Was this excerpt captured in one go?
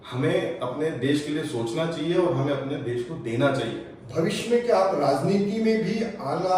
yes; 0 cuts

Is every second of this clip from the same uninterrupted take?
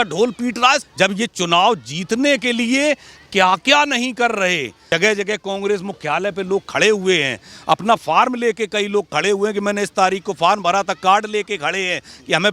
no; 2 cuts; at 0.9 s, 4.7 s

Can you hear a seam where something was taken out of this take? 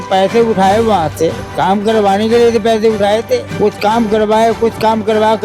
yes; 2 cuts; at 1.5 s, 3.5 s

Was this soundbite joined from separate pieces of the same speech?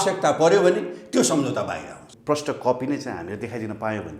yes; 1 cut; at 2.1 s

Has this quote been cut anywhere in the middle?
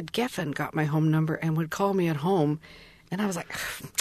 no; 0 cuts

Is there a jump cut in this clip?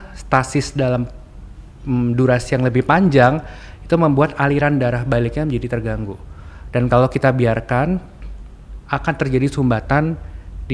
no; 0 cuts

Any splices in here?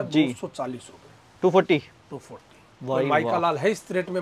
no; 0 cuts

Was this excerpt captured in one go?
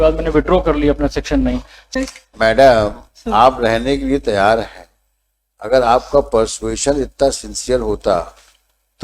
no; 1 cut; at 1.9 s

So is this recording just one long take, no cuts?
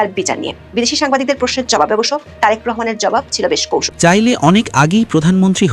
no; 1 cut; at 3.9 s

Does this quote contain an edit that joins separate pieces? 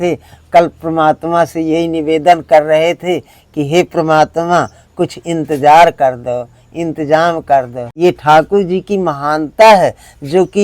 yes; 1 cut; at 7.8 s

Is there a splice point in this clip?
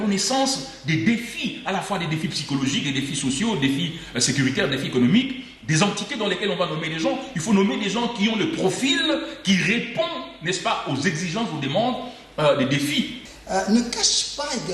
yes; 1 cut; at 13.2 s

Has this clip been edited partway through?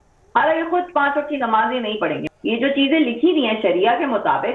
yes; 1 cut; at 2.2 s

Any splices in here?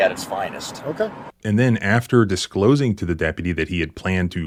no; 0 cuts

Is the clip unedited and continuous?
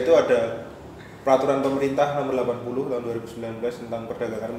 yes; 0 cuts

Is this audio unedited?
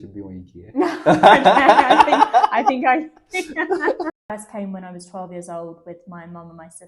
no; 1 cut; at 4.4 s

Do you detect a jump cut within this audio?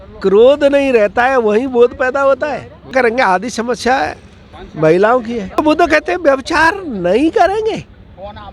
no; 0 cuts

